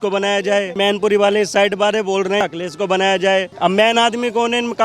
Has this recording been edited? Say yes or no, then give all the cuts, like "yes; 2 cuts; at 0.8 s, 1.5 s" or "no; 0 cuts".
yes; 3 cuts; at 0.8 s, 2.4 s, 3.5 s